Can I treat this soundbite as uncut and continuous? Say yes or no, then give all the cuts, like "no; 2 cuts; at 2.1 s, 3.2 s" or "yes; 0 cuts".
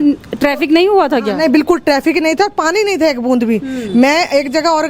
yes; 0 cuts